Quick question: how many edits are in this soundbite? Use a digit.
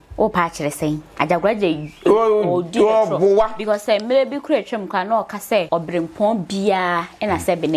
1